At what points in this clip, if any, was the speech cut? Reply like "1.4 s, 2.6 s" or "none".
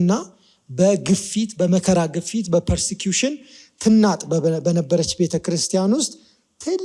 none